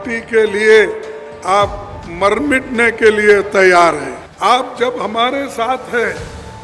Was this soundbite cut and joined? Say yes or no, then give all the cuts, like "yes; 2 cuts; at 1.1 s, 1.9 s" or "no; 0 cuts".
yes; 1 cut; at 4.2 s